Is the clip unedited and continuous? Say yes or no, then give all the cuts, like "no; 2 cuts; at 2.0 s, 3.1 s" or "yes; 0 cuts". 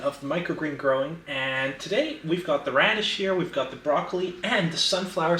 yes; 0 cuts